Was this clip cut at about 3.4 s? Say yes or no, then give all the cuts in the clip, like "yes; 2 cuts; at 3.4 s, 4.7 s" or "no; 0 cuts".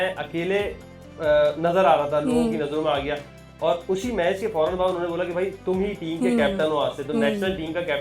no; 0 cuts